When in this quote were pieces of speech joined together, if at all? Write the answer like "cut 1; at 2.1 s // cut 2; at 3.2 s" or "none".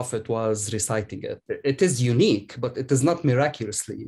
cut 1; at 1.4 s